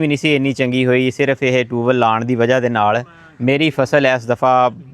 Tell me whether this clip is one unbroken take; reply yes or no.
yes